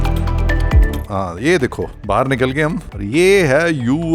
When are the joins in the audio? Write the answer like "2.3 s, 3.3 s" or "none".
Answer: 1.0 s, 1.9 s, 2.9 s